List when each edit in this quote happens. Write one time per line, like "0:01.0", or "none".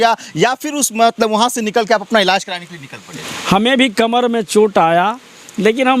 0:03.2